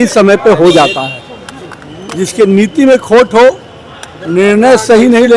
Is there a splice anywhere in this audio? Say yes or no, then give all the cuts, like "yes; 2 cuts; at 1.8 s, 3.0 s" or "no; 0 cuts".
no; 0 cuts